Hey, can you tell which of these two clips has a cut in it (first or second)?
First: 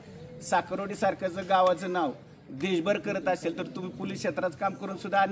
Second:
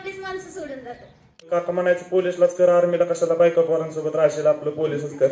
second